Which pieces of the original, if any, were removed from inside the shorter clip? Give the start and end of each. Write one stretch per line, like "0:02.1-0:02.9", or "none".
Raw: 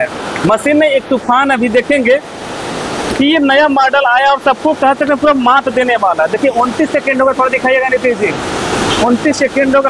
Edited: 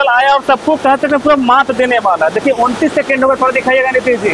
none